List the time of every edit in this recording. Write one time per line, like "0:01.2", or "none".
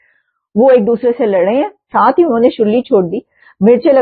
0:01.8